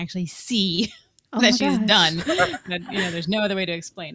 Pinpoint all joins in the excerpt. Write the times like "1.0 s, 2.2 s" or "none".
none